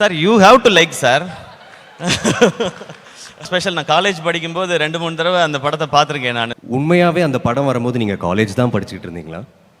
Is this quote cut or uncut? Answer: cut